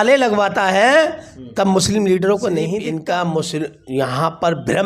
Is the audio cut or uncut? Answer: cut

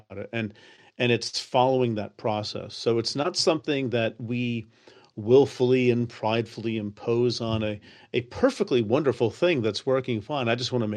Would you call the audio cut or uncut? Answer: uncut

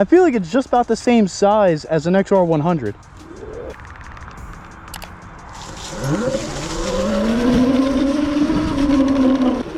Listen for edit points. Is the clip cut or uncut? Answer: uncut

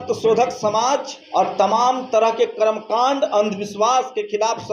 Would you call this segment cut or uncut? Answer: cut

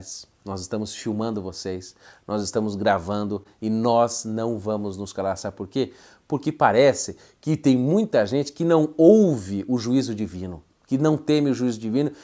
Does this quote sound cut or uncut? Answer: uncut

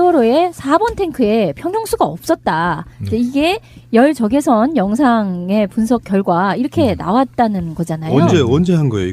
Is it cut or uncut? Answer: uncut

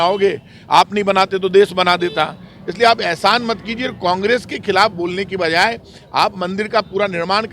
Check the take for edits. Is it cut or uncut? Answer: uncut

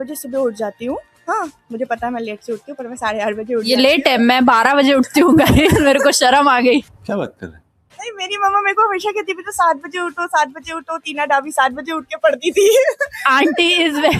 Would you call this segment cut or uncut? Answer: uncut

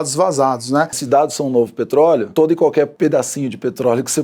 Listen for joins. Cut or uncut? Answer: cut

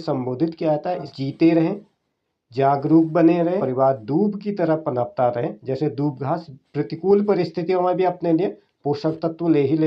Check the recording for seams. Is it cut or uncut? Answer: cut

